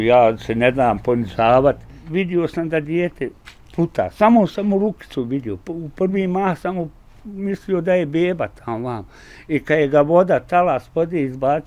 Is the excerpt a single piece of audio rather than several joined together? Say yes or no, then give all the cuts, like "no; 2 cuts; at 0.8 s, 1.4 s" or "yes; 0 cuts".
no; 1 cut; at 1.9 s